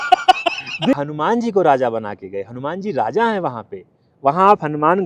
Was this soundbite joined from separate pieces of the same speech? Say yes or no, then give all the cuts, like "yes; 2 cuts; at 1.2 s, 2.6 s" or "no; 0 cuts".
yes; 1 cut; at 1.0 s